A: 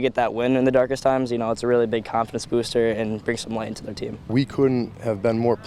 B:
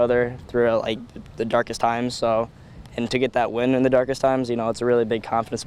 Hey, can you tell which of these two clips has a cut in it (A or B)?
A